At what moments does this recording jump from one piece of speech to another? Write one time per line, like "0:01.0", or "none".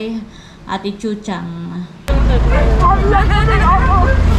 0:02.1